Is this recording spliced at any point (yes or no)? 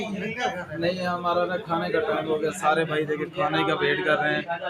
no